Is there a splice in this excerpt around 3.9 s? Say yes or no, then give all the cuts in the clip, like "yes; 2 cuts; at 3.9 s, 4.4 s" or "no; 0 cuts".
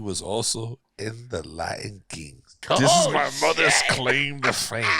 no; 1 cut; at 2.6 s